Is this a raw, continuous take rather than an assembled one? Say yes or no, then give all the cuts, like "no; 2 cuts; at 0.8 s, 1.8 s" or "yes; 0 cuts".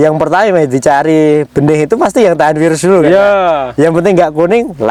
yes; 0 cuts